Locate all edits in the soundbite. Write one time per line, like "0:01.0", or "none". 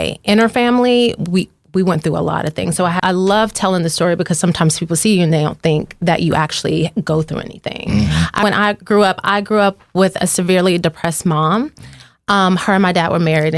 0:03.0
0:08.4